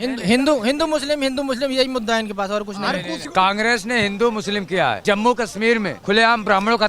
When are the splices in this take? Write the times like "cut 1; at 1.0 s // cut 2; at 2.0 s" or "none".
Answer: cut 1; at 3.2 s // cut 2; at 5.0 s // cut 3; at 6.0 s